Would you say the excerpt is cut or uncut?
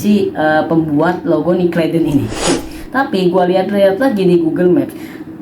cut